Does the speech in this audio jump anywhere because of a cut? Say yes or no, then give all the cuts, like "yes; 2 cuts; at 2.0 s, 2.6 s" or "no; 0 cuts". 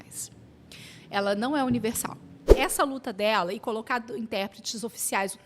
yes; 1 cut; at 2.5 s